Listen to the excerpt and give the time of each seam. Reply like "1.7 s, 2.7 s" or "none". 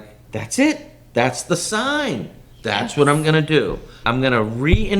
3.9 s